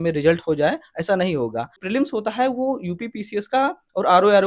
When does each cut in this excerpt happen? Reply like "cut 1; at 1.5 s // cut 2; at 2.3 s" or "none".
cut 1; at 1.8 s